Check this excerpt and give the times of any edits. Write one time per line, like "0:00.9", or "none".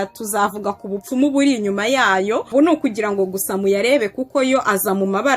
0:02.5